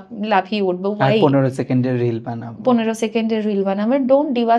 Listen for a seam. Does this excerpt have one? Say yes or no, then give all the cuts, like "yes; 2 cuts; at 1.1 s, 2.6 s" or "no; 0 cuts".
no; 0 cuts